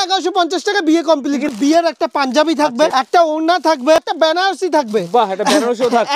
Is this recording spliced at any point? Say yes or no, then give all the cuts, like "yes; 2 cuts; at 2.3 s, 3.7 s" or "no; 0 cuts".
yes; 3 cuts; at 1.5 s, 2.9 s, 4.0 s